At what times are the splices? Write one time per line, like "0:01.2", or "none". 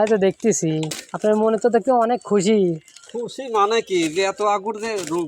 0:01.0